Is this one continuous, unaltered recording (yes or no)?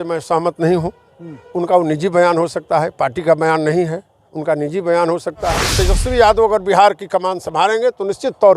no